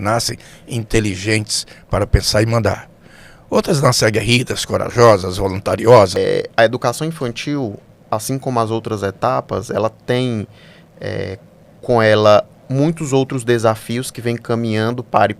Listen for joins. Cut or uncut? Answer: cut